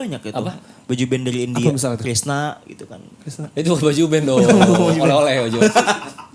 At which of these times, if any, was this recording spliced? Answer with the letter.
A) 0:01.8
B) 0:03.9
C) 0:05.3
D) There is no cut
D